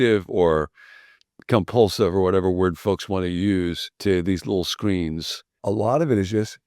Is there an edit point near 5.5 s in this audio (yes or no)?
yes